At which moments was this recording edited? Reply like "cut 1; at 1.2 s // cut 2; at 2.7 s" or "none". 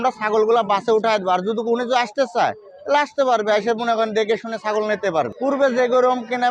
cut 1; at 5.3 s